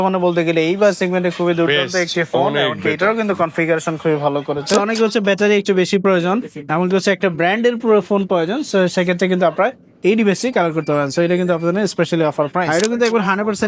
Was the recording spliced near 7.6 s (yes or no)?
no